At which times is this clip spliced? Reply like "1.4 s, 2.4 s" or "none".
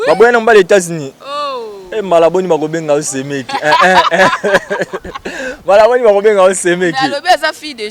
none